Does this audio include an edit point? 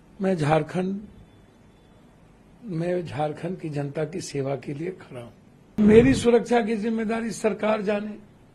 yes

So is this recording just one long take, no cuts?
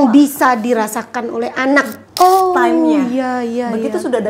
no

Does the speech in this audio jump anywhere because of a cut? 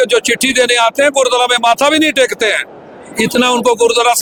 no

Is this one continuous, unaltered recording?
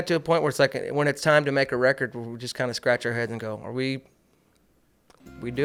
yes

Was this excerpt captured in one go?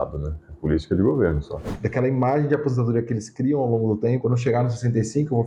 no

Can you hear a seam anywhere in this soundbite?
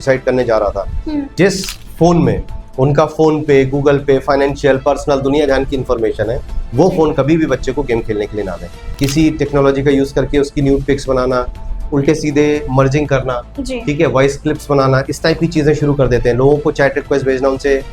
yes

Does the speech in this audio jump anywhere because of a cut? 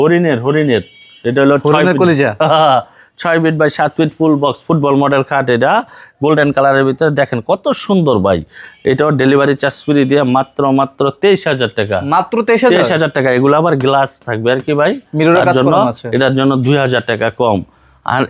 no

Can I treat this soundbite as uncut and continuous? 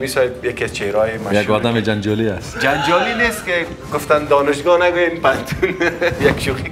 yes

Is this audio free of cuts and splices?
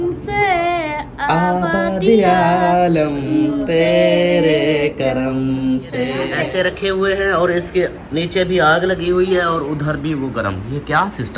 no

